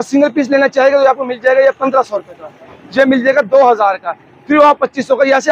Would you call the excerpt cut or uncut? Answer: uncut